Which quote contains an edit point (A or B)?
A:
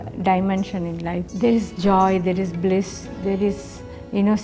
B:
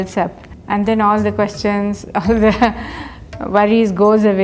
A